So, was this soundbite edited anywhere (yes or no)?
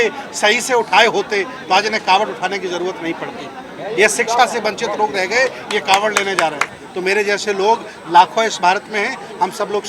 yes